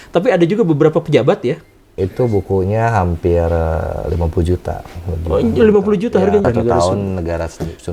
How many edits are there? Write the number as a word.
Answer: two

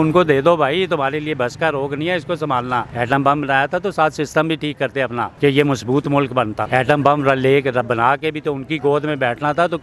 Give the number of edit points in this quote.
three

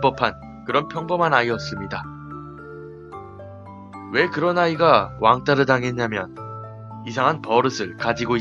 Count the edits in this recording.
one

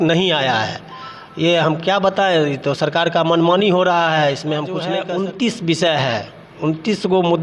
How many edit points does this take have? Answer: one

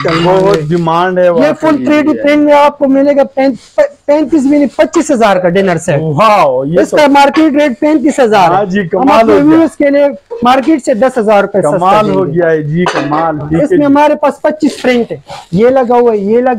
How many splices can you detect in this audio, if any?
zero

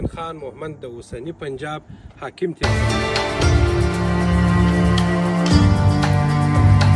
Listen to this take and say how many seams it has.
one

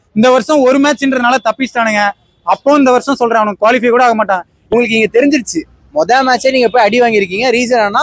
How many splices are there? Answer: one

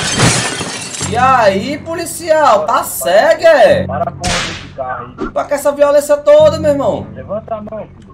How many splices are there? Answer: two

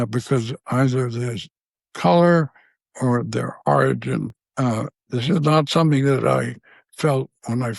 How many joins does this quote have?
one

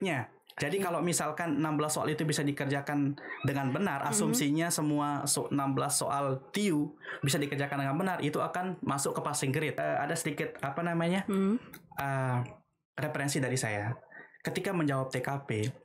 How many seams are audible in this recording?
one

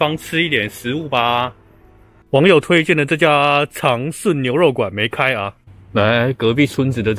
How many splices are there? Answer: zero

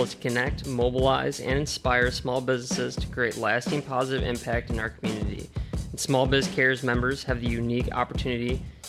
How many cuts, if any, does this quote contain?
zero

